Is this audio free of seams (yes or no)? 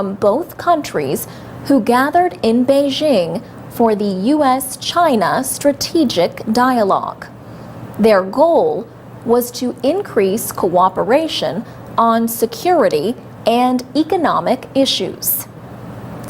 no